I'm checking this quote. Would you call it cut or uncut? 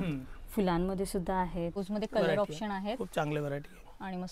cut